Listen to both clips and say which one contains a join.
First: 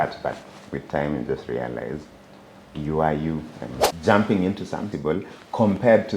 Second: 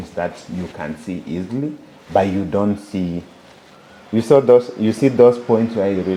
first; 2 cuts; at 3.8 s, 4.9 s

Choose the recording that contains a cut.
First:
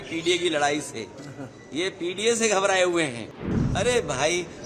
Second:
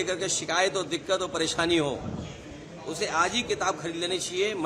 first; 1 cut; at 3.5 s

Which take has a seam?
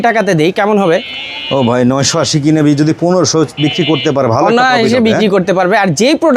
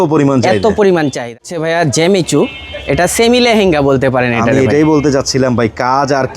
second; 1 cut; at 0.9 s

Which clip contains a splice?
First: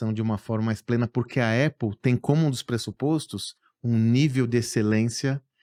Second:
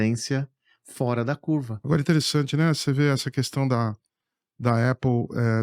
second; 1 cut; at 1.8 s

